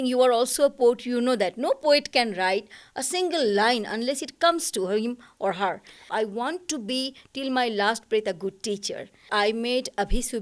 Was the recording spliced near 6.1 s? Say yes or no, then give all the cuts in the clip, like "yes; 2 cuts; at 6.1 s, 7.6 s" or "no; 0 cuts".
yes; 2 cuts; at 6.1 s, 9.3 s